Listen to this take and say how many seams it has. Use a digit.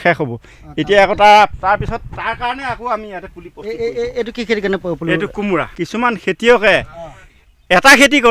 1